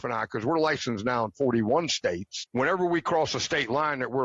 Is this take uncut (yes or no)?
no